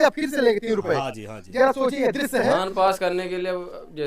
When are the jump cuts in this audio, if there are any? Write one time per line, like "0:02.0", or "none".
0:02.6